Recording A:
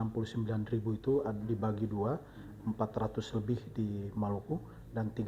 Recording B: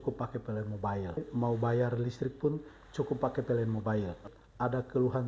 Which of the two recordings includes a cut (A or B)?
B